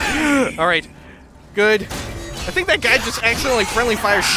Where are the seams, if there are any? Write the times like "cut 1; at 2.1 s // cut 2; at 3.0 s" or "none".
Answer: cut 1; at 2.1 s